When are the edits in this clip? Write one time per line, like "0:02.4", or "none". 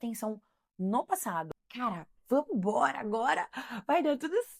0:01.6